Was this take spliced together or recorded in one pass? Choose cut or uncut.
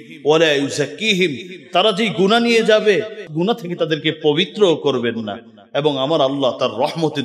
cut